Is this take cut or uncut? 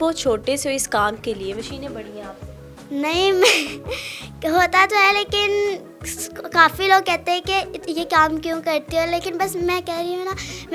uncut